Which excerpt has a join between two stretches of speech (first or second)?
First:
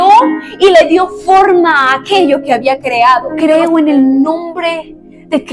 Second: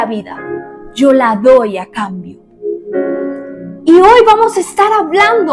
first